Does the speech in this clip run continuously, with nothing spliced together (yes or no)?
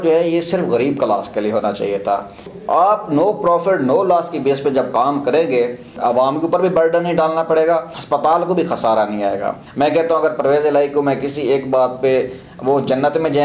no